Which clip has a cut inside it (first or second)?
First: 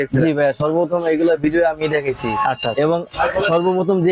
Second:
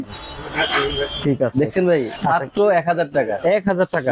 second